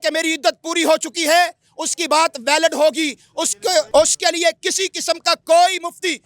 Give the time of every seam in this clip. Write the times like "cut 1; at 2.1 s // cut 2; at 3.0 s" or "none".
cut 1; at 3.9 s